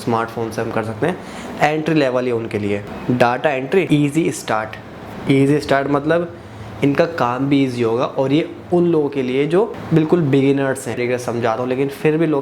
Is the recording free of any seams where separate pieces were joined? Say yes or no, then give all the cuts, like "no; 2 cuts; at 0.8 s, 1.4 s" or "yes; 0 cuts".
no; 3 cuts; at 2.9 s, 3.9 s, 11.0 s